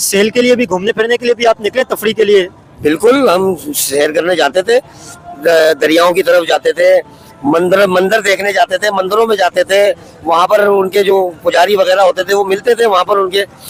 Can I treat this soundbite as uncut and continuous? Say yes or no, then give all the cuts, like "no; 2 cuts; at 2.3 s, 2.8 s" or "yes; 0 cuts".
yes; 0 cuts